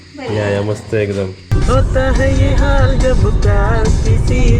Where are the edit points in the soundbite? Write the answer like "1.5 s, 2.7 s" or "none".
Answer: 1.5 s